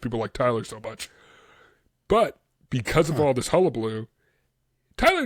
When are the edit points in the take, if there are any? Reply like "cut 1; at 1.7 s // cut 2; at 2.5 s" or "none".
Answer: none